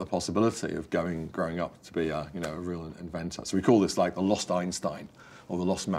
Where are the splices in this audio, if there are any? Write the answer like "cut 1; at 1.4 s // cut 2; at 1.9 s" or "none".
none